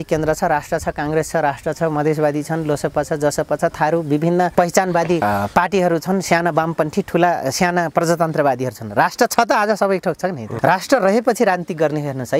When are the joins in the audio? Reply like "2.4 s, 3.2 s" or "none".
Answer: 4.8 s, 10.5 s